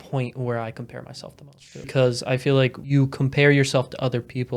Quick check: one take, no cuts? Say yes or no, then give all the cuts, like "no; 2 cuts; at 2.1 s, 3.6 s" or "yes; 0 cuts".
no; 2 cuts; at 1.9 s, 2.8 s